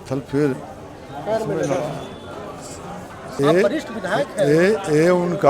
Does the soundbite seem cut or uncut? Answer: cut